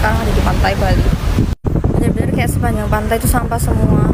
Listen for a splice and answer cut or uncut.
uncut